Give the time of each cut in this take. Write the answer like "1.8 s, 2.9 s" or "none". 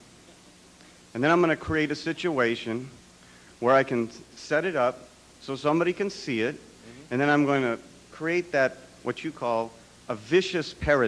9.4 s